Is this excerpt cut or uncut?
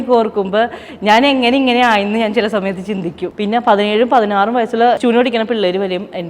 cut